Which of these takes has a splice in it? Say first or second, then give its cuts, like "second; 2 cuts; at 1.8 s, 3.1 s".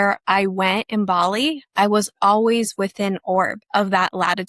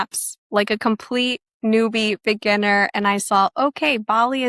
first; 1 cut; at 3.6 s